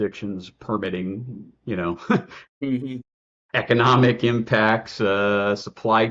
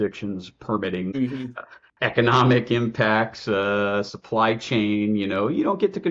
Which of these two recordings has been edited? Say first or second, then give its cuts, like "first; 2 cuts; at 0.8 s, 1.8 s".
second; 1 cut; at 1.5 s